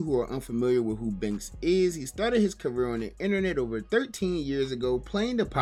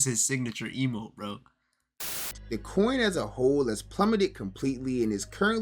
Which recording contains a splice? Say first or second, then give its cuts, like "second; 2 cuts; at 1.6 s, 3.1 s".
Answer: second; 1 cut; at 2.2 s